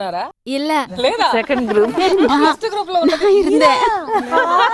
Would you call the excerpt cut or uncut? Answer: uncut